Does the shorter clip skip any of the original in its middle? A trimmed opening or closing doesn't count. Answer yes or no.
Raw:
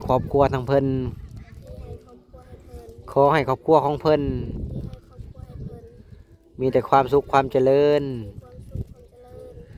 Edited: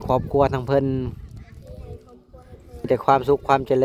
yes